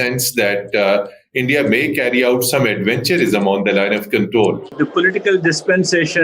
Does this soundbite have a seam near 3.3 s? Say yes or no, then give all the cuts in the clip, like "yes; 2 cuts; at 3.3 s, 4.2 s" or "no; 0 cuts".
no; 1 cut; at 4.7 s